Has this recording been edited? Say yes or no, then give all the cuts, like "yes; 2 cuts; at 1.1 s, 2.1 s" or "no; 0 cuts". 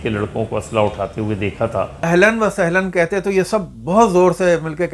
yes; 1 cut; at 2.0 s